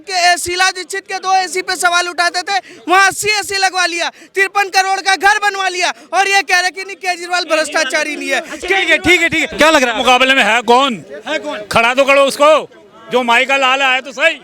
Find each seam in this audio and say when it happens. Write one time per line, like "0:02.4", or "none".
0:09.5